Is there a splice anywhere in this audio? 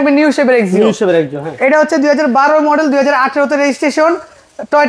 no; 0 cuts

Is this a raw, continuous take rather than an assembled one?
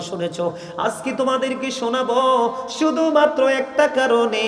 yes; 0 cuts

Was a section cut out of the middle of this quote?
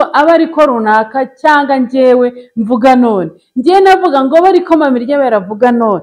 no; 0 cuts

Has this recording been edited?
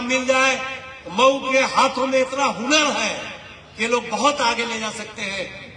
no; 0 cuts

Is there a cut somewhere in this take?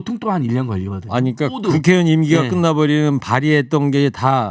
yes; 1 cut; at 1.6 s

